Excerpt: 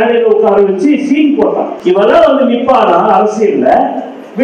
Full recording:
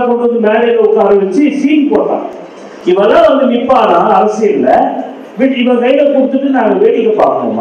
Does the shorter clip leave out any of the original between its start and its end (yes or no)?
yes